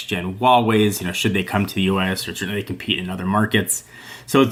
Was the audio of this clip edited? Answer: no; 0 cuts

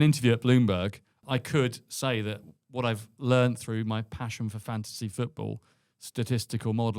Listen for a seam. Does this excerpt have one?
yes; 1 cut; at 1.2 s

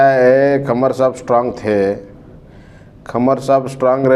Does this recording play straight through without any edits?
yes; 0 cuts

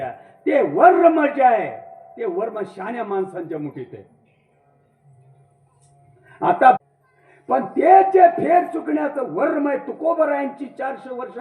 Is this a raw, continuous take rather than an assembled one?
no; 1 cut; at 6.8 s

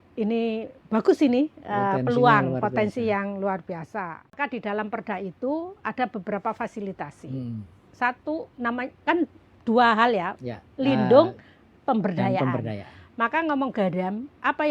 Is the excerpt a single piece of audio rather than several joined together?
no; 1 cut; at 4.3 s

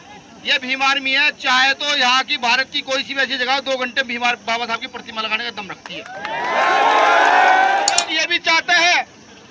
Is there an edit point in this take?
yes; 1 cut; at 8.0 s

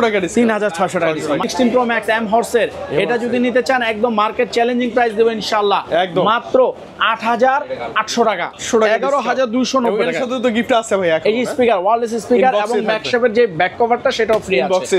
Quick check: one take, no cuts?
no; 2 cuts; at 1.5 s, 8.6 s

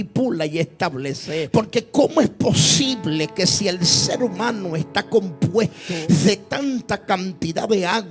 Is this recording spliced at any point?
yes; 2 cuts; at 1.3 s, 5.8 s

